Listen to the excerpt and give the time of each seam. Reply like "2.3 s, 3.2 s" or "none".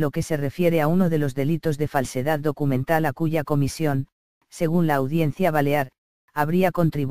none